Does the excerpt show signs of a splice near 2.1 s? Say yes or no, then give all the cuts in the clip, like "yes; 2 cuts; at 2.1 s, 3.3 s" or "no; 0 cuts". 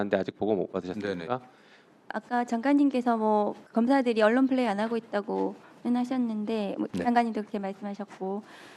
yes; 2 cuts; at 2.1 s, 6.8 s